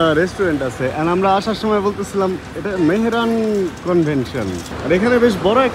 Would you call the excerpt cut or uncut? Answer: cut